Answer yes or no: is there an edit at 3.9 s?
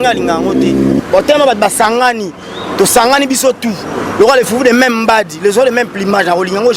no